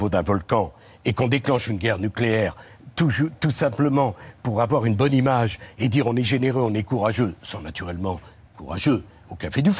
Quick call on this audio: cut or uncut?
uncut